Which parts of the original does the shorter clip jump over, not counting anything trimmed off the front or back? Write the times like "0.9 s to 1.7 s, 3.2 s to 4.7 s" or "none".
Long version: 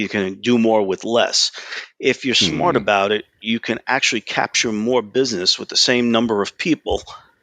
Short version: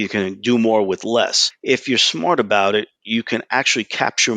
1.5 s to 1.8 s